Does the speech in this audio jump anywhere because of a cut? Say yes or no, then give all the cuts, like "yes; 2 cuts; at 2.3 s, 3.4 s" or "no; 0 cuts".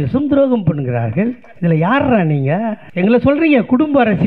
yes; 2 cuts; at 1.5 s, 2.8 s